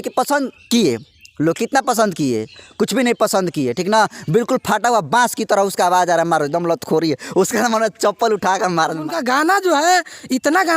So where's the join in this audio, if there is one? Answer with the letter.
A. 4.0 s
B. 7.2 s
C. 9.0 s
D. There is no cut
C